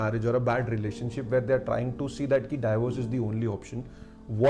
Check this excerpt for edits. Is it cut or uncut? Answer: uncut